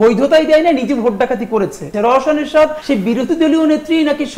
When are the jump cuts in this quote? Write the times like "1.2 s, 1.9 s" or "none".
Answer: 1.9 s